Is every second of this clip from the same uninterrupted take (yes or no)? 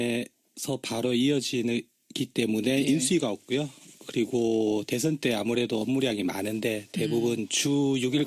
yes